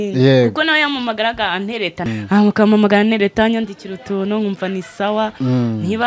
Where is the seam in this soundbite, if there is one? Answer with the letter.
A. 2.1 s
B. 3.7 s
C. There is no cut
A